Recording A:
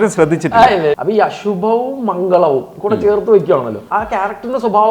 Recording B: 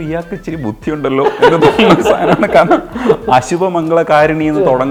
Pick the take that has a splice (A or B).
A